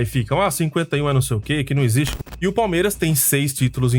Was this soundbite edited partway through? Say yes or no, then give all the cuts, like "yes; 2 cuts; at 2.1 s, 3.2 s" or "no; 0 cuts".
yes; 1 cut; at 2.2 s